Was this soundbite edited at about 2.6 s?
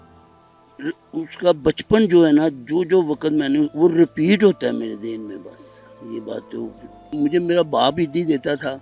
no; 1 cut; at 7.0 s

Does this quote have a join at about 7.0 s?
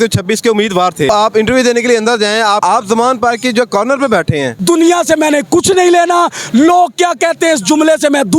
no; 3 cuts; at 1.1 s, 2.6 s, 4.5 s

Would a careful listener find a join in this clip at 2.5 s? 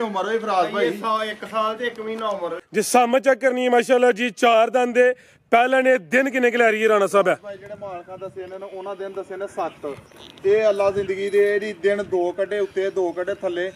yes; 1 cut; at 2.5 s

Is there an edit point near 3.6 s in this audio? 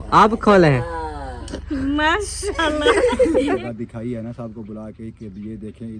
yes; 1 cut; at 3.6 s

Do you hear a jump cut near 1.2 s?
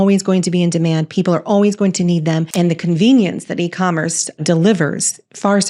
no; 2 cuts; at 2.5 s, 4.4 s

